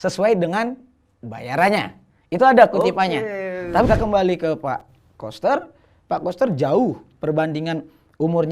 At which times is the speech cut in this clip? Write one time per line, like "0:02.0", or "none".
0:03.9